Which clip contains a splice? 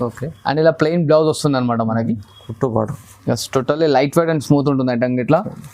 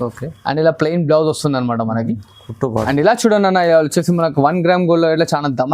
second; 1 cut; at 2.9 s

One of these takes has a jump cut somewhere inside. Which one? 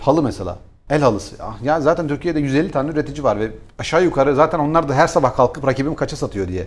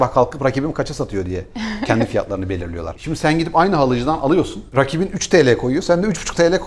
second; 2 cuts; at 2.9 s, 4.6 s

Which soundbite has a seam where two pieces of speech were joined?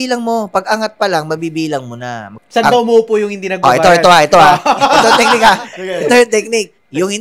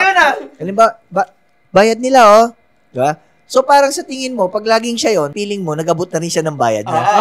first; 1 cut; at 2.3 s

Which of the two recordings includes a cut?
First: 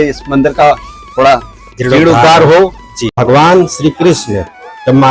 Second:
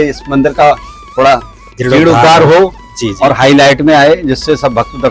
first; 1 cut; at 3.1 s

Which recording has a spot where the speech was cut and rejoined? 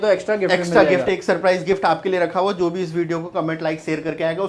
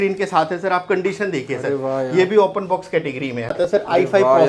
second; 1 cut; at 3.5 s

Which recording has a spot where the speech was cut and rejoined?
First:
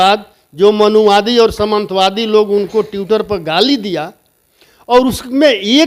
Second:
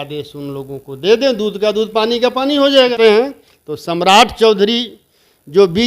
second; 1 cut; at 2.9 s

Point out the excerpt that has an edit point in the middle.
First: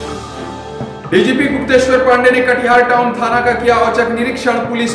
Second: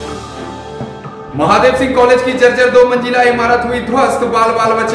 first; 1 cut; at 1.0 s

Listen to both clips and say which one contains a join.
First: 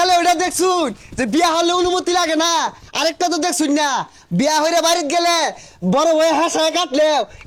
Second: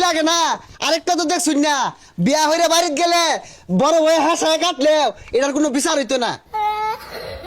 second; 1 cut; at 6.4 s

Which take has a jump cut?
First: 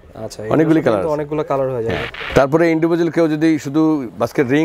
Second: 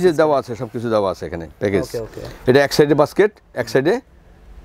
first; 1 cut; at 2.2 s

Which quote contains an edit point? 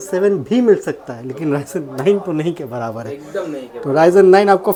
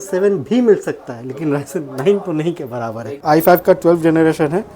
second; 1 cut; at 3.1 s

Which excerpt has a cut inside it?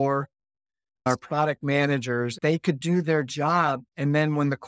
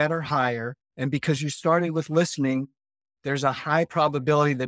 first; 3 cuts; at 1.1 s, 2.4 s, 3.9 s

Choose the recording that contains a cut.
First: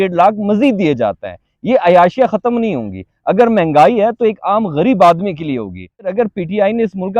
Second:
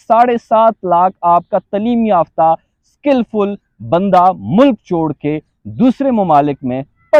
first; 1 cut; at 6.1 s

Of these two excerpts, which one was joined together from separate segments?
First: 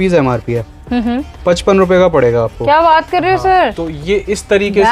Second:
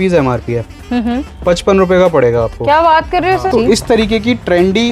second; 1 cut; at 3.5 s

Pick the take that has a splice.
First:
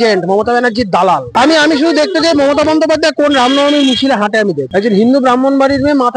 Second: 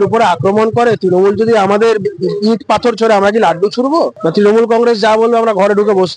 first; 2 cuts; at 1.3 s, 4.6 s

